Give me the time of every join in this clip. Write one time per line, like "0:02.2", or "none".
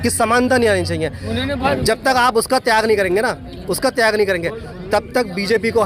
0:01.6